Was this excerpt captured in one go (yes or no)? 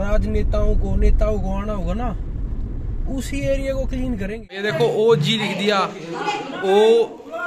no